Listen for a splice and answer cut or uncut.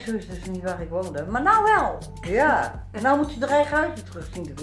uncut